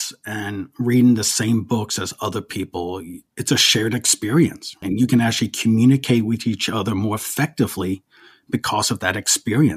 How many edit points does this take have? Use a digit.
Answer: 1